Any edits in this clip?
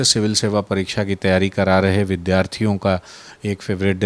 no; 0 cuts

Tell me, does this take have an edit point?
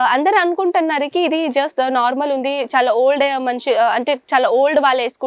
no; 0 cuts

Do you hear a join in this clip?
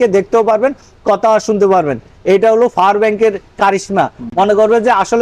no; 0 cuts

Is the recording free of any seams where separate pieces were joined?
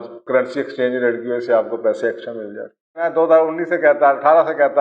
no; 1 cut; at 2.8 s

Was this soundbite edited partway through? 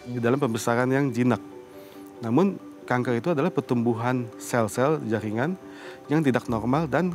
no; 0 cuts

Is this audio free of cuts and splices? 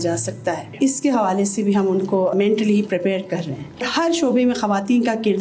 no; 1 cut; at 3.9 s

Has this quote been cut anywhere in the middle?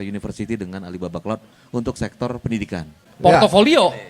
yes; 1 cut; at 2.9 s

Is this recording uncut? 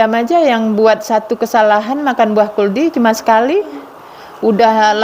yes; 0 cuts

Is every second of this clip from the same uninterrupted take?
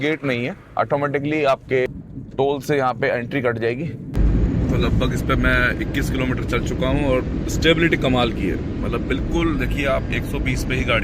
no; 2 cuts; at 2.5 s, 4.0 s

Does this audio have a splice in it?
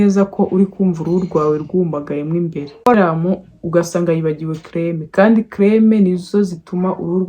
yes; 1 cut; at 2.9 s

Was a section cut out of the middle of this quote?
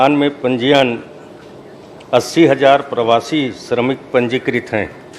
no; 0 cuts

